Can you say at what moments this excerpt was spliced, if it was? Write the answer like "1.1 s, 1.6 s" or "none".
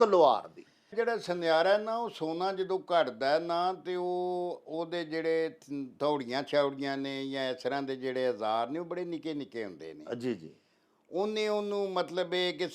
0.9 s